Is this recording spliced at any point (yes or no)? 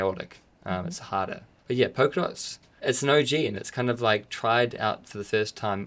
yes